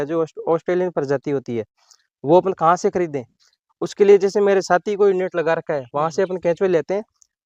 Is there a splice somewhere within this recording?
no; 0 cuts

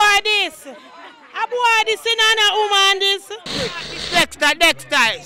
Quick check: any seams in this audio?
yes; 1 cut; at 3.9 s

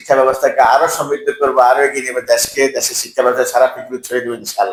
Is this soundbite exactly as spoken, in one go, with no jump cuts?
yes; 0 cuts

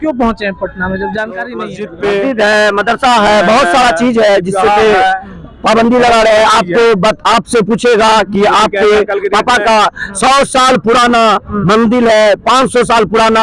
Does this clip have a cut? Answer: yes; 1 cut; at 1.8 s

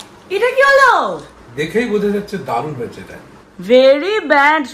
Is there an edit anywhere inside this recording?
no; 0 cuts

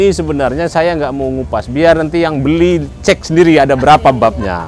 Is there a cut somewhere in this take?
no; 0 cuts

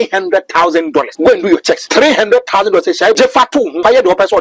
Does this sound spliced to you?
yes; 3 cuts; at 1.1 s, 1.8 s, 3.5 s

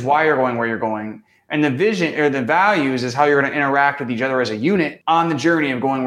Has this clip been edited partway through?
yes; 1 cut; at 5.0 s

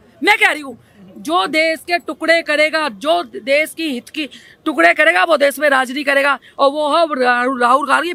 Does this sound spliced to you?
no; 0 cuts

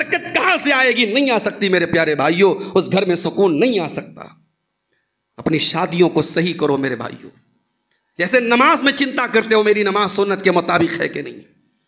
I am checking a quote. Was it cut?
no; 0 cuts

